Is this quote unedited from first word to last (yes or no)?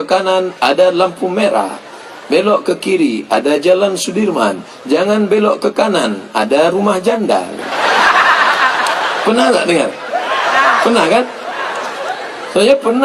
yes